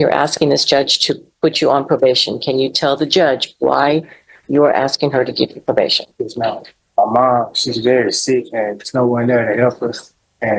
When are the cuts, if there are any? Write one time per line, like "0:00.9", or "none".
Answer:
0:06.8